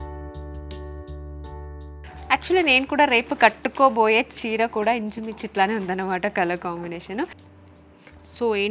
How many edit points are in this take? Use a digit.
1